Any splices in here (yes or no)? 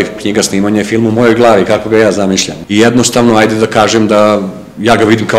yes